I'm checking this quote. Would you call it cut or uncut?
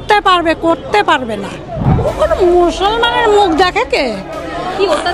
cut